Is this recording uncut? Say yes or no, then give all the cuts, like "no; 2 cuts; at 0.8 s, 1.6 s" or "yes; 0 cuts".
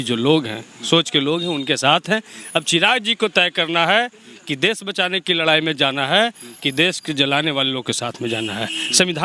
yes; 0 cuts